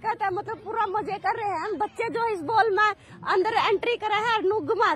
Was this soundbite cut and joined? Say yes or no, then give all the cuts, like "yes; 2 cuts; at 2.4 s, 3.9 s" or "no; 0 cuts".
no; 0 cuts